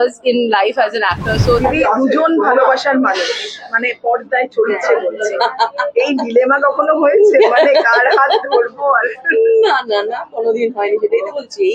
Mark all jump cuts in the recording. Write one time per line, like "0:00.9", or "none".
0:01.6